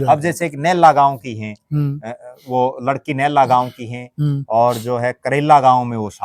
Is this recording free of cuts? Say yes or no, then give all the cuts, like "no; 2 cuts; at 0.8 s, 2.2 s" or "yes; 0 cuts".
yes; 0 cuts